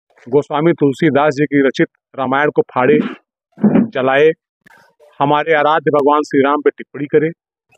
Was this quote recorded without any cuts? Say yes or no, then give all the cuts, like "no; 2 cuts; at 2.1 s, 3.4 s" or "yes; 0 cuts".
yes; 0 cuts